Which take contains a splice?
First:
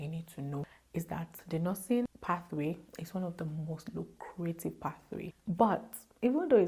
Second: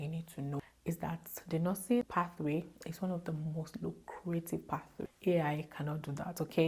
second; 2 cuts; at 2.0 s, 5.1 s

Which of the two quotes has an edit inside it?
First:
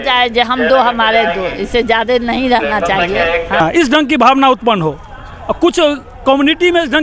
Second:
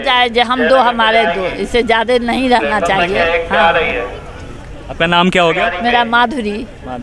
first; 1 cut; at 3.6 s

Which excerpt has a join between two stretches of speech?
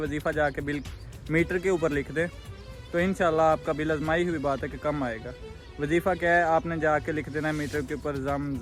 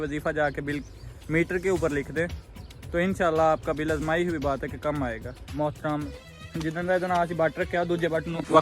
second; 1 cut; at 5.5 s

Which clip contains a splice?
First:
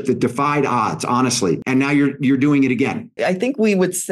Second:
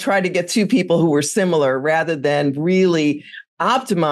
first; 2 cuts; at 1.6 s, 3.1 s

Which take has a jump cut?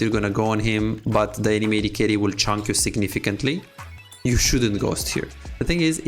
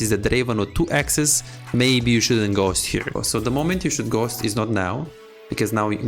second; 1 cut; at 3.2 s

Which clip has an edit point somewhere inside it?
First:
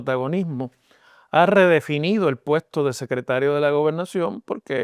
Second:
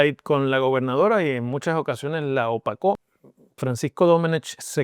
second; 1 cut; at 3.1 s

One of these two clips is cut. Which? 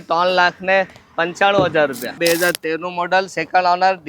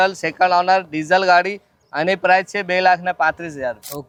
first; 1 cut; at 2.1 s

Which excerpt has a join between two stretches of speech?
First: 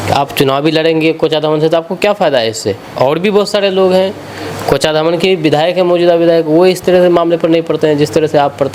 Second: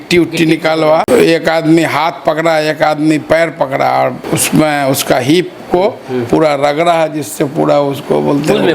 second; 2 cuts; at 1.1 s, 4.3 s

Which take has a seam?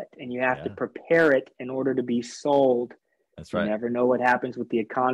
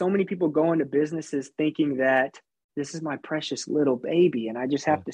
second; 1 cut; at 2.6 s

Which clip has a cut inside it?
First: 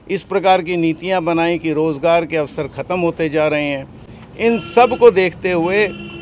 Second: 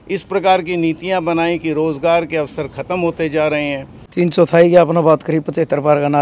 second; 1 cut; at 3.9 s

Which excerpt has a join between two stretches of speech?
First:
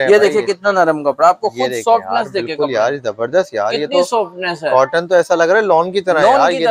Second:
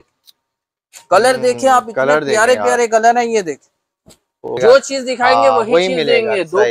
second; 1 cut; at 4.6 s

